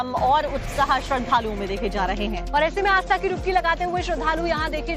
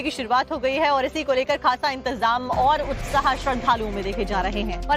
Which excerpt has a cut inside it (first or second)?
second